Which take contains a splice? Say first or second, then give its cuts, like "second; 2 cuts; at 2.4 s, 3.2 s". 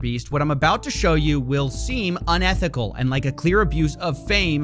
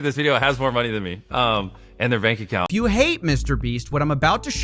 second; 1 cut; at 2.7 s